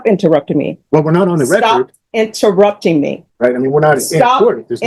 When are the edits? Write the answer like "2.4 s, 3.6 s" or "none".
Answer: 3.2 s